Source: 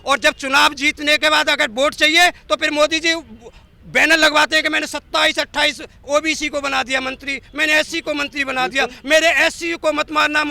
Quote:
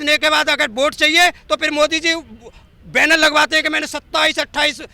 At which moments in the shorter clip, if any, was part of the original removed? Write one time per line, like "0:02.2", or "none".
none